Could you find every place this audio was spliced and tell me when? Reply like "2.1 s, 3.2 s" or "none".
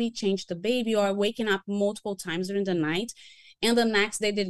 none